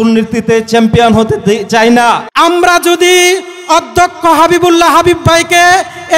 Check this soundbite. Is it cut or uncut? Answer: cut